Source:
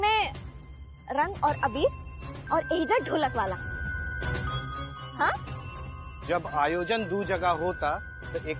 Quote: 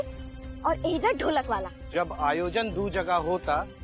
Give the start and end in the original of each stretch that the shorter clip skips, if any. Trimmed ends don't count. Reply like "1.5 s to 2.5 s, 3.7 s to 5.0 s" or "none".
3.6 s to 6.1 s